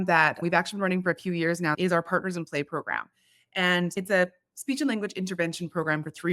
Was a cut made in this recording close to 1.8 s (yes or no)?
yes